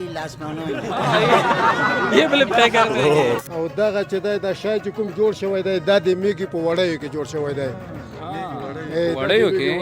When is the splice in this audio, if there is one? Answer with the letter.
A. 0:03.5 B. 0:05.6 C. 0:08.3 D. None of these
A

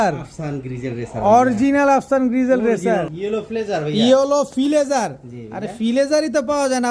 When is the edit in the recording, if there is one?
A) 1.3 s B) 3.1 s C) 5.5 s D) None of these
B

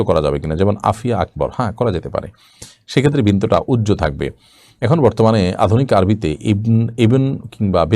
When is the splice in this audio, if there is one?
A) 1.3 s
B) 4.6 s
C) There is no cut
C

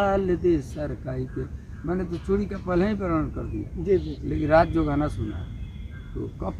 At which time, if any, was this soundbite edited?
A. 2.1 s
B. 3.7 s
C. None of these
C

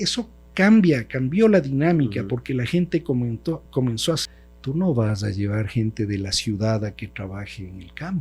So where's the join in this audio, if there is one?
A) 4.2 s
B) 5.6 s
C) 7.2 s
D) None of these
A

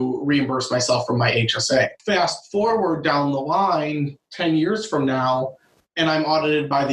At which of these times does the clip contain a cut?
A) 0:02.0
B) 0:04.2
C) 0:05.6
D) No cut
A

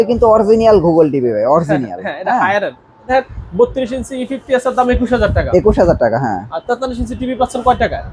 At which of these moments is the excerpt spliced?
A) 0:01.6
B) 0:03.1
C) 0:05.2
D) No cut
B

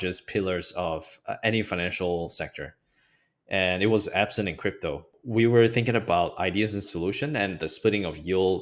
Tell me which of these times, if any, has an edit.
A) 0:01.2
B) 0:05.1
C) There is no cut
B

